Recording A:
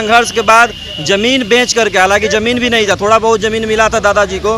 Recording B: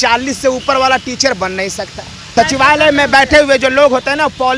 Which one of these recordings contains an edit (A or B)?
B